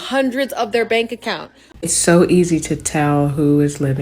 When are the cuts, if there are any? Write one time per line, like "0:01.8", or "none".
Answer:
0:01.7